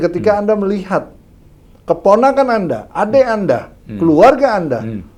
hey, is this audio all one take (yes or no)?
yes